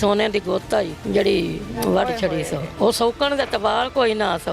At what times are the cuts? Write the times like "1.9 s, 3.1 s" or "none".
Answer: 1.0 s, 2.7 s